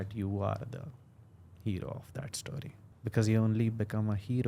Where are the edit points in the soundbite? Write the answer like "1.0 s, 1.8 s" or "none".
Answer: 2.8 s